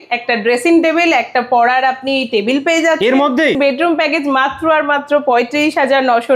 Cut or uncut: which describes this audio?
cut